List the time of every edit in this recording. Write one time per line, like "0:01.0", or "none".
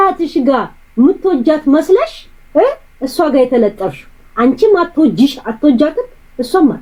none